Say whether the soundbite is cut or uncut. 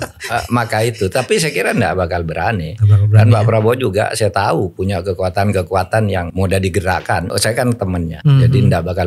cut